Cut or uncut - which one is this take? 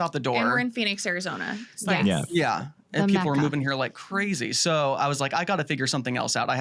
uncut